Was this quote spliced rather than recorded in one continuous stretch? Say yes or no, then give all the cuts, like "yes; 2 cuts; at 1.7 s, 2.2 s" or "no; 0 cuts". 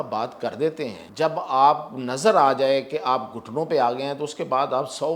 yes; 1 cut; at 1.0 s